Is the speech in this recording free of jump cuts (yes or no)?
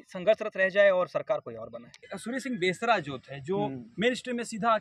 no